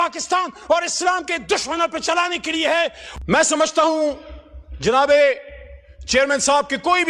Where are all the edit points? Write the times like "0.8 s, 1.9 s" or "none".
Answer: 3.0 s